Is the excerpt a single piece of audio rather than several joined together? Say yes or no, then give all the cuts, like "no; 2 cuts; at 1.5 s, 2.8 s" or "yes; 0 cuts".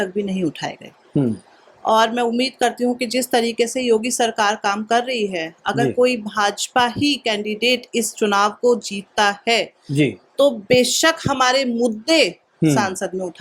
yes; 0 cuts